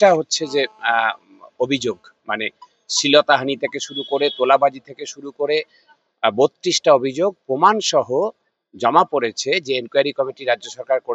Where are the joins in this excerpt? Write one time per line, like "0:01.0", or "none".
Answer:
none